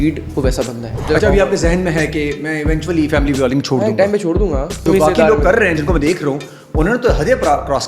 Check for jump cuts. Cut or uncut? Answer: cut